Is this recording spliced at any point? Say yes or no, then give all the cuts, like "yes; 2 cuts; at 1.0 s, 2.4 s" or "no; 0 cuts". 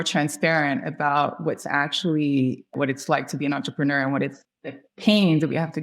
yes; 2 cuts; at 2.7 s, 4.5 s